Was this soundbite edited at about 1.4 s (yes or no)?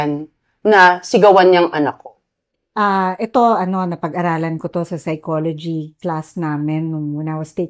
no